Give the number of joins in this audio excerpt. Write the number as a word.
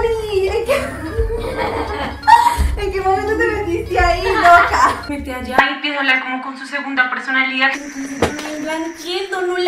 one